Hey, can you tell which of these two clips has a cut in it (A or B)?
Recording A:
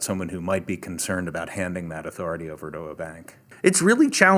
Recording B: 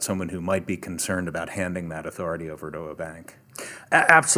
A